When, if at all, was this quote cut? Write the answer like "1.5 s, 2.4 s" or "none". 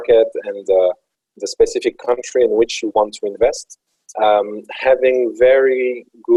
none